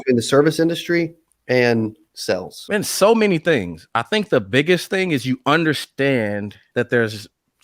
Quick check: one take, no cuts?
no; 3 cuts; at 2.5 s, 3.9 s, 6.6 s

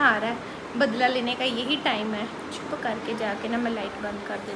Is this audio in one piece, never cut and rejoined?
yes; 0 cuts

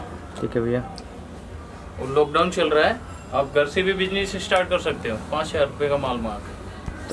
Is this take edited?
no; 0 cuts

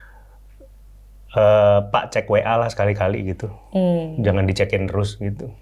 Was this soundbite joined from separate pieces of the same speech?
no; 0 cuts

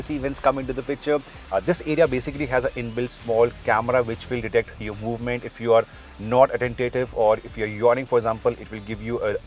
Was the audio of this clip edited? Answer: yes; 1 cut; at 1.3 s

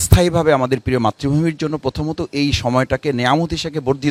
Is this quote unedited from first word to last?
yes; 0 cuts

